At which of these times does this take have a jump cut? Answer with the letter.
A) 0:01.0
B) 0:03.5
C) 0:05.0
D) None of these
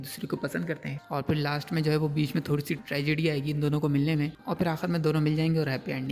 A